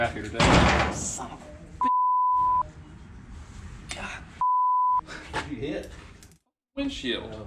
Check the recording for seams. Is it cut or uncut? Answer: cut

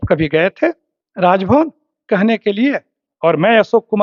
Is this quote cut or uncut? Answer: uncut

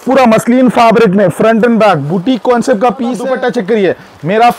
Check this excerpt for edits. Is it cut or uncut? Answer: cut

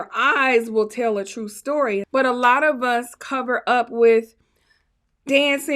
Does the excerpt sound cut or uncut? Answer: cut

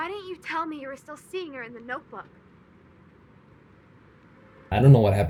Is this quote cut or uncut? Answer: uncut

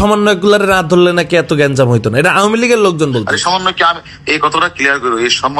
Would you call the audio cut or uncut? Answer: uncut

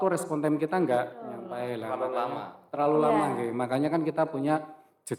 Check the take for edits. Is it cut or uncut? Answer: uncut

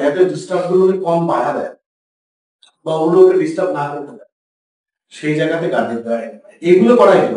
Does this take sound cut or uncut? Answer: uncut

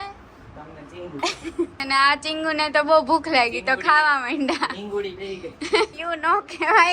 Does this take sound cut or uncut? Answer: cut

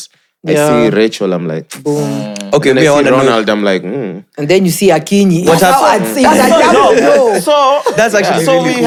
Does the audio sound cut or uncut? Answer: uncut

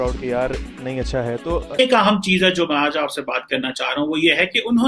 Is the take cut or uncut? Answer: cut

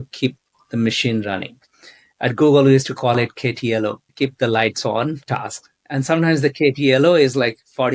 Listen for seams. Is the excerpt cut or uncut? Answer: cut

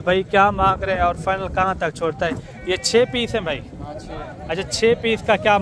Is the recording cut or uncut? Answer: uncut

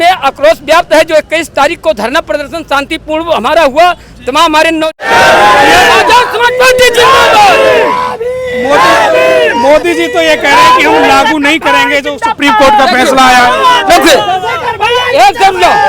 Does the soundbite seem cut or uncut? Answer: cut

